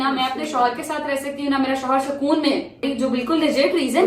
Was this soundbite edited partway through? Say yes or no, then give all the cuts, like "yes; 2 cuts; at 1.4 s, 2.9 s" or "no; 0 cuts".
yes; 1 cut; at 2.8 s